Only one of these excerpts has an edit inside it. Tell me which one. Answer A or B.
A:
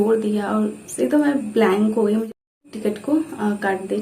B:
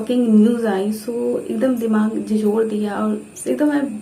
A